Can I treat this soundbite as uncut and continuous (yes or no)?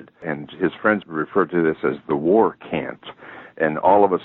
no